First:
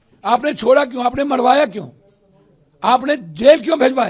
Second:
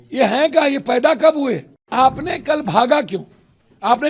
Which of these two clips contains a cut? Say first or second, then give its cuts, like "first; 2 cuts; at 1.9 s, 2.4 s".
second; 1 cut; at 1.9 s